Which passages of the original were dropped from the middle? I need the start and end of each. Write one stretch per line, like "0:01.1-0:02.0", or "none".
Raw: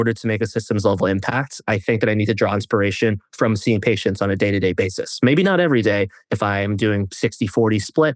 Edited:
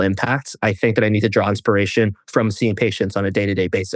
none